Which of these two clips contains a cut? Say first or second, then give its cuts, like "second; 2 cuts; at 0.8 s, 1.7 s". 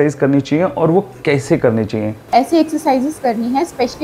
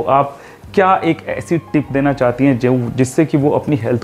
first; 1 cut; at 2.3 s